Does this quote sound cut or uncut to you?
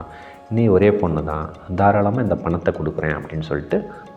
uncut